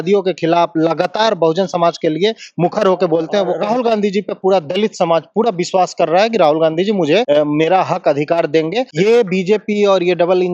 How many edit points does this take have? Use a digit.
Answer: 3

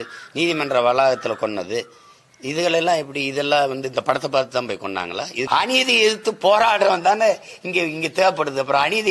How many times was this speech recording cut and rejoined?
1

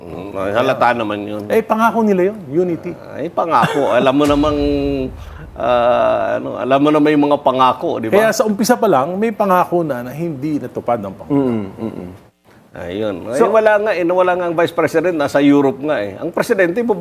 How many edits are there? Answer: 0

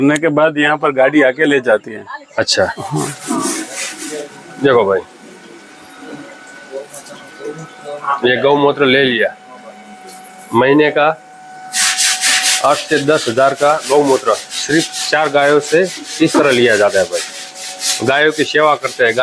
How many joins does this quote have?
1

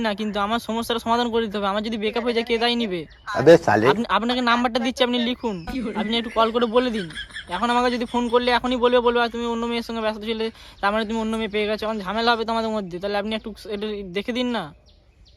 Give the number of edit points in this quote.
0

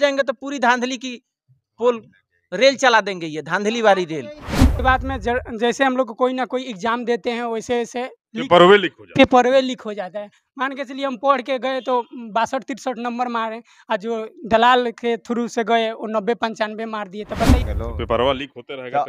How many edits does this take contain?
2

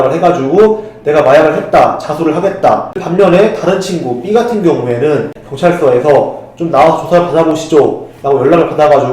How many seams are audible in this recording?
2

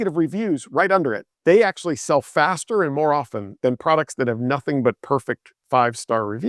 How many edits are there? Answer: 1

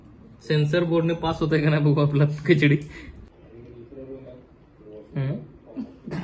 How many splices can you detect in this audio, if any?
1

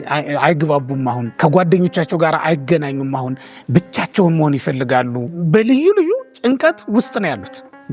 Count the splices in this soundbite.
2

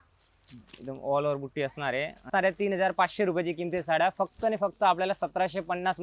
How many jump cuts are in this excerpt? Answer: 1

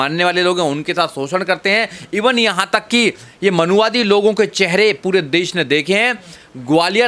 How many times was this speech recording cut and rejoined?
0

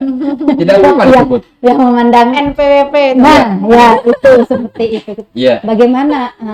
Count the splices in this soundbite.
0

